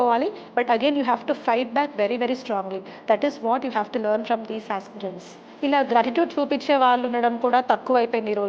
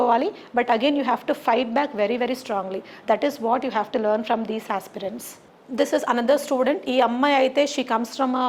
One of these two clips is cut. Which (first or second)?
first